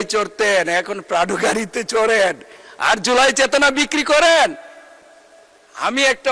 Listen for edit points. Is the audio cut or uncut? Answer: uncut